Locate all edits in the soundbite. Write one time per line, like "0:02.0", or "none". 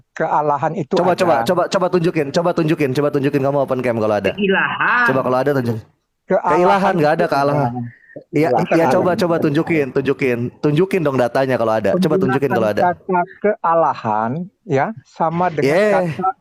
none